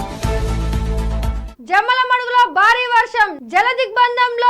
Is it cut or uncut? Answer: cut